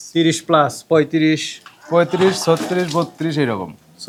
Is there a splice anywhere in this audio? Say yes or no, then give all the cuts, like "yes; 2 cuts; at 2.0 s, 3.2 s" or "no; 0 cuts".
no; 0 cuts